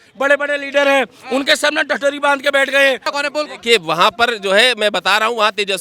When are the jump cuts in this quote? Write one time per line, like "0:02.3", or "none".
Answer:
0:03.1